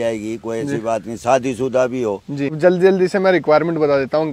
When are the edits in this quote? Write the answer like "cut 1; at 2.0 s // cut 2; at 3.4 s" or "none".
cut 1; at 2.6 s